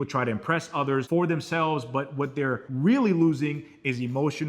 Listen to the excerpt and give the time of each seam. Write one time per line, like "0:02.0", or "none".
0:01.1
0:02.7